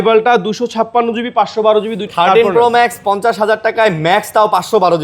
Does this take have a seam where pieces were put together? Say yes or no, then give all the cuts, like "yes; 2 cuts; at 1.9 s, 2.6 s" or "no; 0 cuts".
yes; 1 cut; at 2.1 s